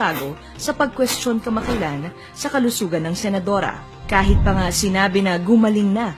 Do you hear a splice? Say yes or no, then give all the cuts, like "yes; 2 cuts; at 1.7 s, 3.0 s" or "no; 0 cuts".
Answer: yes; 1 cut; at 1.2 s